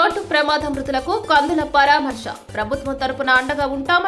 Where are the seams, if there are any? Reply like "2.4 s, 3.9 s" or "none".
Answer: none